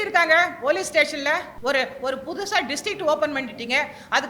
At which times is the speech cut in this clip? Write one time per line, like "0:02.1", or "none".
0:01.5

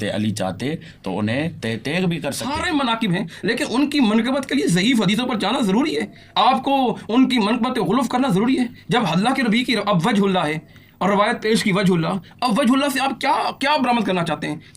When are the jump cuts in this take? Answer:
0:02.4

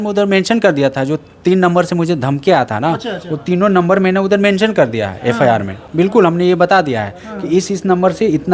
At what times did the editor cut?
none

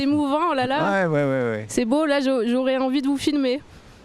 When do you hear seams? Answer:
none

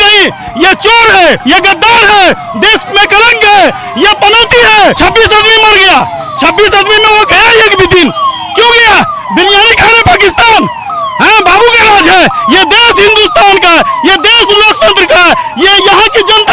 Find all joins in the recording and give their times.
0:01.4
0:05.0

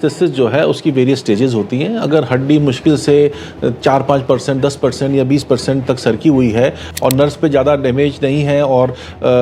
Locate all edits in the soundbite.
0:06.8

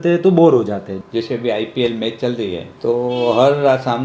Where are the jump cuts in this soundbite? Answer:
0:00.9
0:02.7

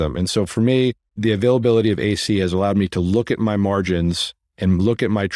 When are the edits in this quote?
0:01.2

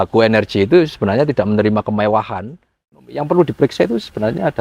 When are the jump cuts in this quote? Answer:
0:03.1

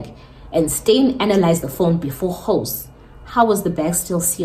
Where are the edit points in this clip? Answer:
none

